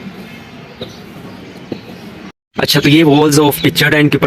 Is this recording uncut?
no; 1 cut; at 2.3 s

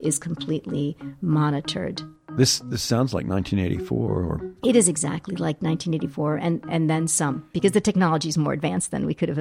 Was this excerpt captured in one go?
no; 1 cut; at 7.5 s

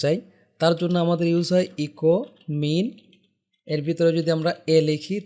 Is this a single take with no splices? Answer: yes; 0 cuts

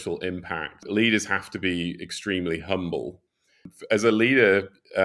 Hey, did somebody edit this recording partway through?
yes; 2 cuts; at 0.8 s, 3.7 s

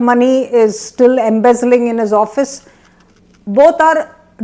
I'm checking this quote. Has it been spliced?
no; 0 cuts

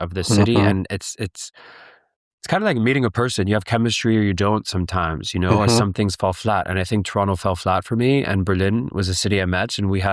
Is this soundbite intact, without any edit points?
yes; 0 cuts

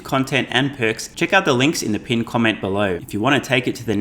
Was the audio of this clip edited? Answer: yes; 2 cuts; at 1.1 s, 3.0 s

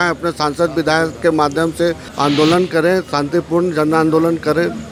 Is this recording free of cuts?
yes; 0 cuts

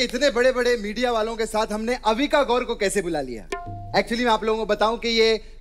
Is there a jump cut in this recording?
no; 0 cuts

